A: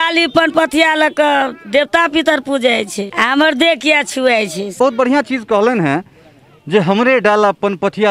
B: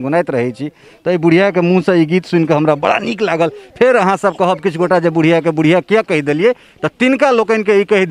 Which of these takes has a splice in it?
A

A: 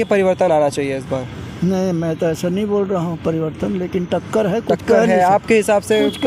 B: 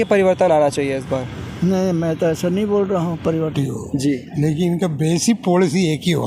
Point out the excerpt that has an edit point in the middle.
B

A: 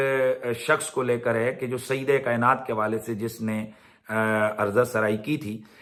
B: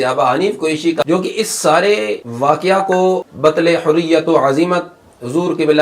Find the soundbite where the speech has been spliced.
B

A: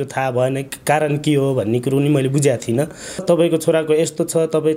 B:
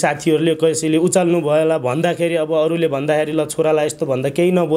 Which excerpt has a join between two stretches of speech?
A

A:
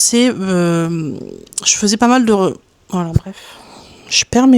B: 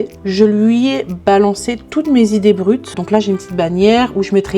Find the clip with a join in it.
B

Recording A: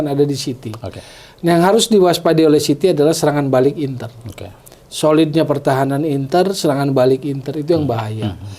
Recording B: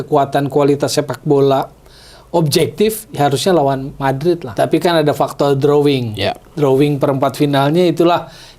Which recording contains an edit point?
B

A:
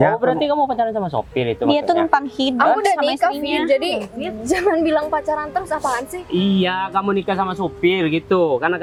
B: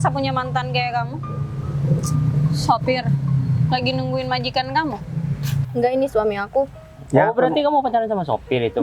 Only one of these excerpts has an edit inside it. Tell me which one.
B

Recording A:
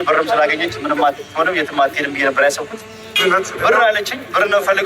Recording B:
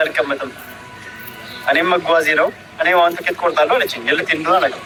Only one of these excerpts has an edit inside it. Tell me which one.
A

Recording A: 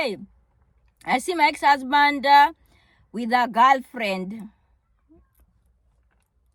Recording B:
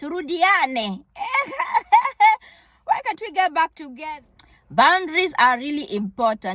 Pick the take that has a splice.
B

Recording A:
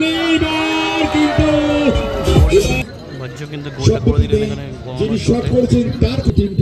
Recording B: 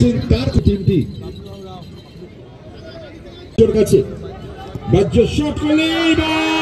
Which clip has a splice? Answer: B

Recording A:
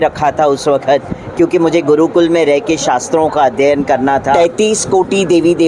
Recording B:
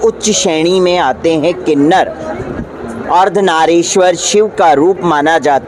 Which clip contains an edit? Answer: A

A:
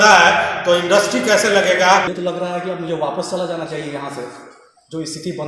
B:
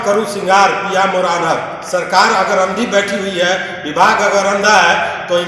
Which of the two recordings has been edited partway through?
A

